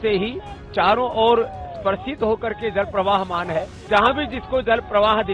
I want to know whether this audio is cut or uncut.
cut